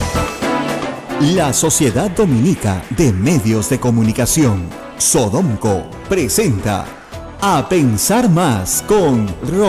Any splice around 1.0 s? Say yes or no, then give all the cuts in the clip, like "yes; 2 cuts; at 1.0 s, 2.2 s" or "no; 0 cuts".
yes; 1 cut; at 1.0 s